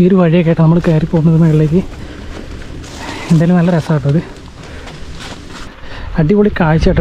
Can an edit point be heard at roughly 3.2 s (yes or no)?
no